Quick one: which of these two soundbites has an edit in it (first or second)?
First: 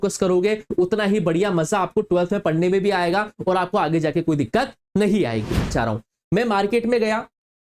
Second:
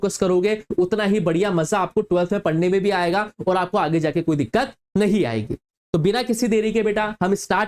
first